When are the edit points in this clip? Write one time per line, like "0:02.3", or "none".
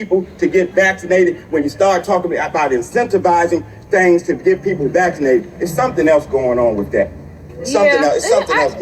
none